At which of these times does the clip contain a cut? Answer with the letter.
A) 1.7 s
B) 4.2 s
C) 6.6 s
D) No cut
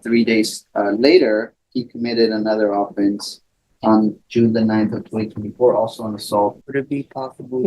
C